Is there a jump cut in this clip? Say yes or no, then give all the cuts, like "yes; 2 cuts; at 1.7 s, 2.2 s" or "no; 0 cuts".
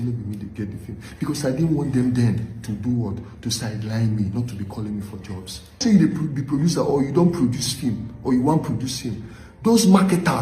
yes; 1 cut; at 5.8 s